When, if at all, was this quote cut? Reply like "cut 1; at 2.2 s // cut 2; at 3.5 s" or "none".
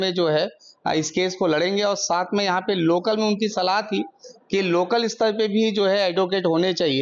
none